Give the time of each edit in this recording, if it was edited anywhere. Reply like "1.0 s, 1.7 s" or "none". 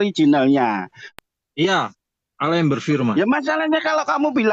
0.9 s